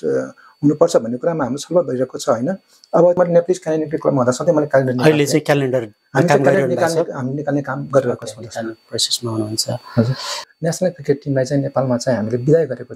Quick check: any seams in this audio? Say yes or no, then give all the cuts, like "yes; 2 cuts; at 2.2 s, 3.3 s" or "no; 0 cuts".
yes; 2 cuts; at 3.2 s, 10.5 s